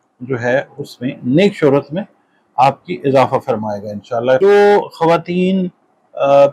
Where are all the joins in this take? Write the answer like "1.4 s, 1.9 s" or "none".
4.4 s

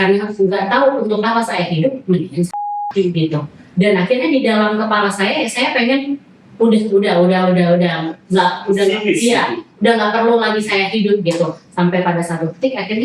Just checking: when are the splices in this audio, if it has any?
none

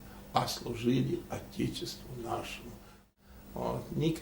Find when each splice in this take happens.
3.0 s

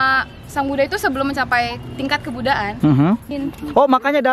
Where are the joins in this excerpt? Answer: 3.3 s

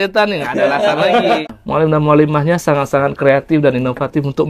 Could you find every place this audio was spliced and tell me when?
1.4 s

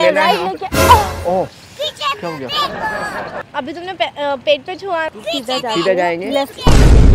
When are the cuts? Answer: 5.1 s

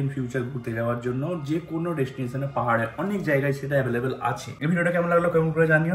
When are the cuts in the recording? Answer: none

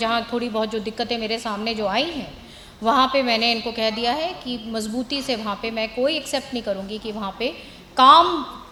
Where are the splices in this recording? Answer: none

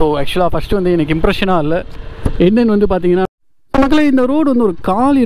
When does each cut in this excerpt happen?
3.2 s

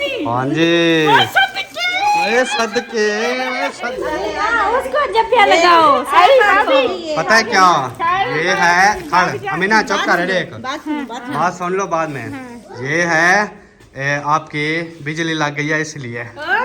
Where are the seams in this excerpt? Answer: 3.9 s

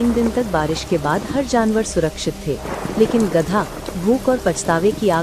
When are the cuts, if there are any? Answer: none

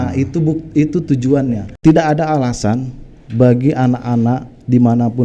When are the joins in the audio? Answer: 1.7 s

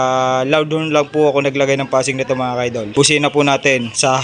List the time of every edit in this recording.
2.9 s

